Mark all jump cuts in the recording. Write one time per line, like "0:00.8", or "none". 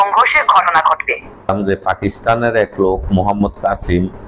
0:01.5